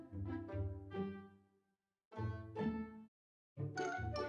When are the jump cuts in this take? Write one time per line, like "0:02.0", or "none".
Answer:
none